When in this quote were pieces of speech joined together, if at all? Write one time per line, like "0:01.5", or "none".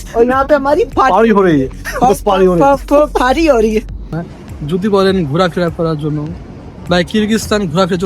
0:04.3